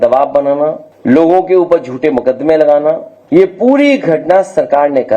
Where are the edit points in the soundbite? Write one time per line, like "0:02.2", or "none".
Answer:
0:00.9
0:03.1

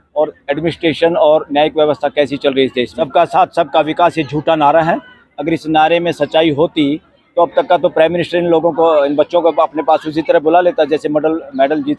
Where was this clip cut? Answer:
0:03.0

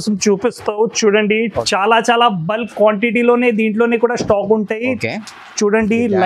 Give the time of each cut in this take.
0:01.5

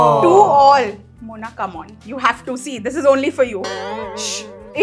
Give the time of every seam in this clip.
0:03.9

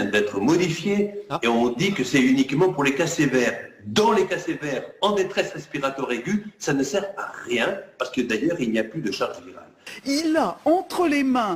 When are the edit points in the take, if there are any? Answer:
0:09.9

